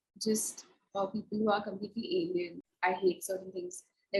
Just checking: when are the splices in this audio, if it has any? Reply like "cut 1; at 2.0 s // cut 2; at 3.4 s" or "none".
cut 1; at 2.6 s